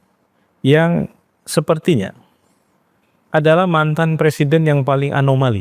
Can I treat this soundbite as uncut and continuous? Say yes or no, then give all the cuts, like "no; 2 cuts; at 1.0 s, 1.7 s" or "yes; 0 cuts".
yes; 0 cuts